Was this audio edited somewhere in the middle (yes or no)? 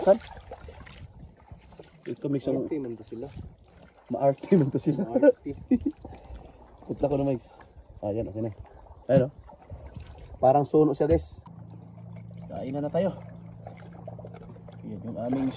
yes